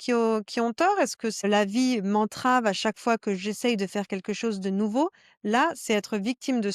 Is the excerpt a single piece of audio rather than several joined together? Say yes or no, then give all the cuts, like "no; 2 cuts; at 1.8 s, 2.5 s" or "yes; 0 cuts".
no; 1 cut; at 1.4 s